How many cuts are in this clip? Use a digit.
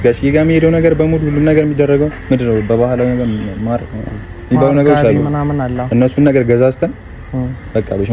0